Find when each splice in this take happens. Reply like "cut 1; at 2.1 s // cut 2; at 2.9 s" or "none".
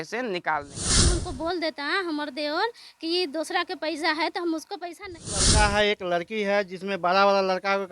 cut 1; at 1.0 s // cut 2; at 5.4 s